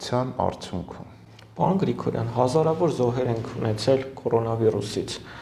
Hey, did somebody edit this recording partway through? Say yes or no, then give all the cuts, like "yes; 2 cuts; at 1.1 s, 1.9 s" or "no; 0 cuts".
no; 0 cuts